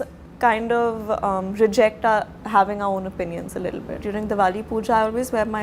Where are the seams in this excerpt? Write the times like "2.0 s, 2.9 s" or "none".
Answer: 4.0 s

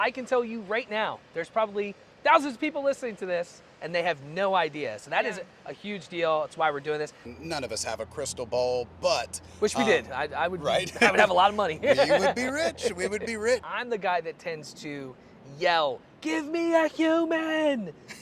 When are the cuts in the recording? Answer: 2.0 s, 7.2 s, 13.7 s

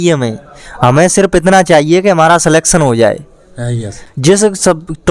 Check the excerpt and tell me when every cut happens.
4.0 s

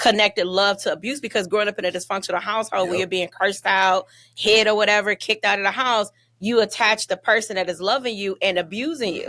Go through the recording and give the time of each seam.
none

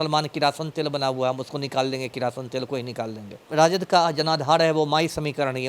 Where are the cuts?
3.4 s

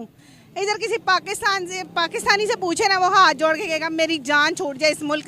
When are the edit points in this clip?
none

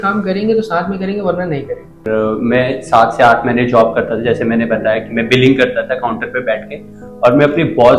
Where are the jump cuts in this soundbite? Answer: 2.0 s

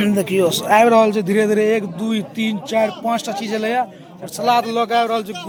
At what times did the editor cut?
none

